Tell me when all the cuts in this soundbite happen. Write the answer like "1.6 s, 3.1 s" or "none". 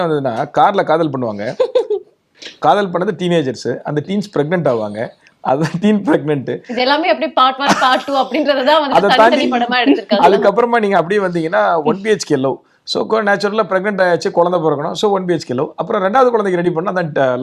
none